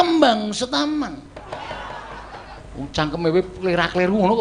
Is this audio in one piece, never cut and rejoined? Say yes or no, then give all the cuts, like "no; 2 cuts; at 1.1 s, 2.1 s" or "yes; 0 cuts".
no; 1 cut; at 2.6 s